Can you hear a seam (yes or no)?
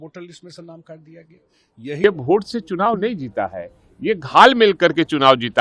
yes